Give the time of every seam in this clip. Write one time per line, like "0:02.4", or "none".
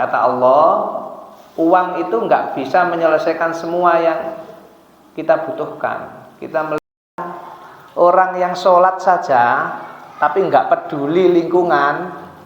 0:07.0